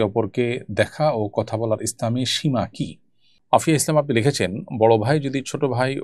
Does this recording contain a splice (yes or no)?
yes